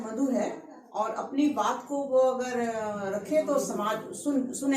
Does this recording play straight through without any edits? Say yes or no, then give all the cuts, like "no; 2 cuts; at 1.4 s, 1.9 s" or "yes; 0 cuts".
yes; 0 cuts